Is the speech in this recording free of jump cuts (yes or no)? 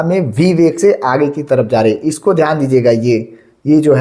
yes